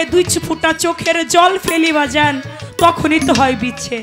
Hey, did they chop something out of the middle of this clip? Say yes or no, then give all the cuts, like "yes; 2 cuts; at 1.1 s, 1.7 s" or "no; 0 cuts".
no; 0 cuts